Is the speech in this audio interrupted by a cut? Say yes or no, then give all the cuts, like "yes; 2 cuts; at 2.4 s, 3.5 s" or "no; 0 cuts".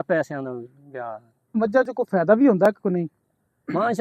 yes; 1 cut; at 1.5 s